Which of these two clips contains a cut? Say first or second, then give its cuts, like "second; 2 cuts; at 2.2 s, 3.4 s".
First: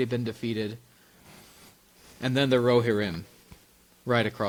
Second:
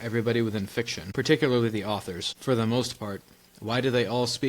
second; 2 cuts; at 1.0 s, 2.3 s